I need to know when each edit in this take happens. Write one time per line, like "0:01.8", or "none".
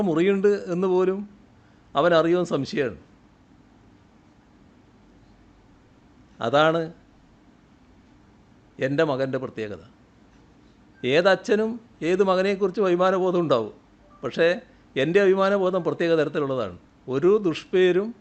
none